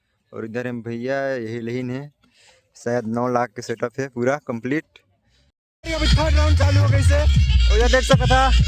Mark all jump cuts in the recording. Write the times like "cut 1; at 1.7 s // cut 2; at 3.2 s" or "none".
cut 1; at 5.6 s